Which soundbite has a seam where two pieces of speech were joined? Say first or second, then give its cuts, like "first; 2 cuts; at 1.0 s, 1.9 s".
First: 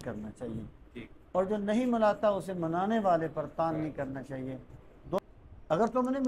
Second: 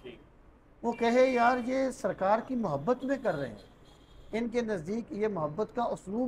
first; 1 cut; at 5.2 s